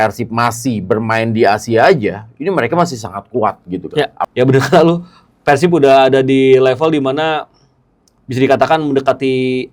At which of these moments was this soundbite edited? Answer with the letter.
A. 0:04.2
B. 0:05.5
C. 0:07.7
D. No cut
A